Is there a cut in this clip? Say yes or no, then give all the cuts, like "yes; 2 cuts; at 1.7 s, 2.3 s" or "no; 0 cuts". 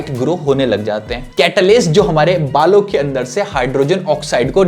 yes; 1 cut; at 1.2 s